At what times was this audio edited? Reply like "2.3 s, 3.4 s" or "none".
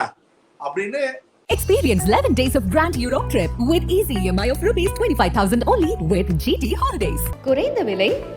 1.3 s